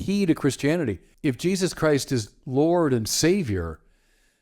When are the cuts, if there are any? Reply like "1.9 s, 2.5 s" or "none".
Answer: 1.1 s

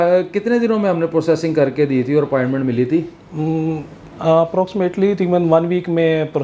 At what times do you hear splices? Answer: none

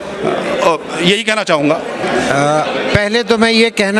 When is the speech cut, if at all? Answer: 2.0 s

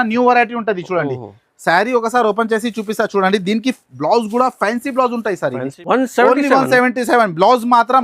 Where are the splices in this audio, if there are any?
5.7 s

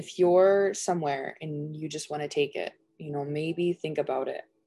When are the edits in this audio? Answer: none

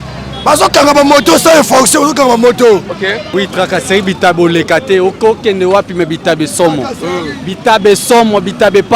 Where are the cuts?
3.2 s

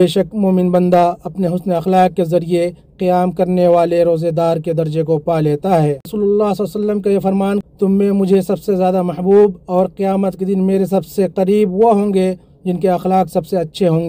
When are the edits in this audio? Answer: 6.1 s, 7.6 s

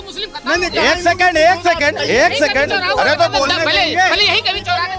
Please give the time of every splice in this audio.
none

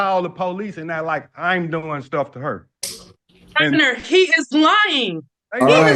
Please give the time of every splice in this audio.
none

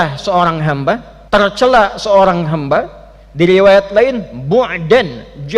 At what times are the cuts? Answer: 1.1 s

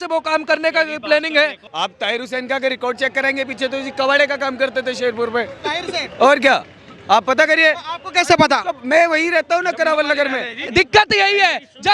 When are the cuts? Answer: 1.6 s, 10.5 s

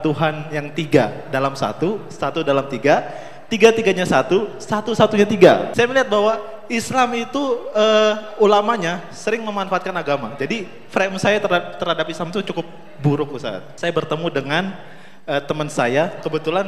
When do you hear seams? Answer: 5.7 s, 10.3 s, 13.7 s

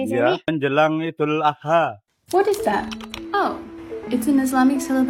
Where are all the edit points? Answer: none

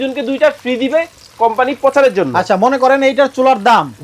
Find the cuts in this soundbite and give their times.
none

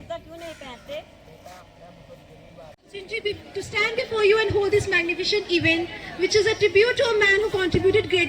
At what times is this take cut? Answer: 2.8 s

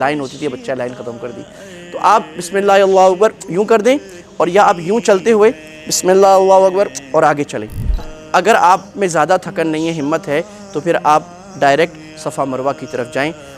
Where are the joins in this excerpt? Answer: 8.1 s

